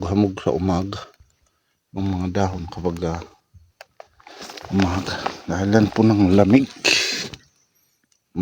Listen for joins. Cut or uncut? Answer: uncut